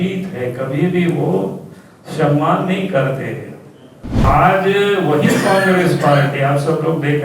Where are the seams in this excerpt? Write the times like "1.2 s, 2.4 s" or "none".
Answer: 4.2 s